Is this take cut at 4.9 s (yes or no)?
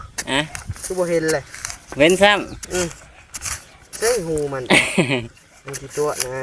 no